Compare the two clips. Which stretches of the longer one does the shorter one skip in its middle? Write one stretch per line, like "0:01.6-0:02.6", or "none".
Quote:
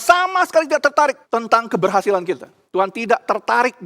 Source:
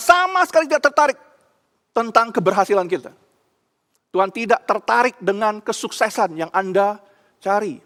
0:01.2-0:01.8
0:03.2-0:03.9